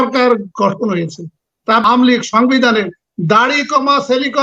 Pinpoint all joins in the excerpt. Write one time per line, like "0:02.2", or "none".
0:01.8